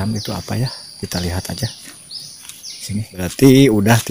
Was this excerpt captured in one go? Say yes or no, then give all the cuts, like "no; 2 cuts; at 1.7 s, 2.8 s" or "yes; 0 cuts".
no; 1 cut; at 3.2 s